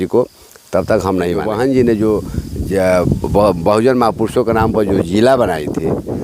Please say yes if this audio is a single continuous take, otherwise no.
no